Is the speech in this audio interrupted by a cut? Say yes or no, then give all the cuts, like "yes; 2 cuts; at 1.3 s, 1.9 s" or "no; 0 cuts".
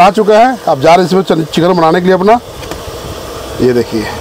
no; 0 cuts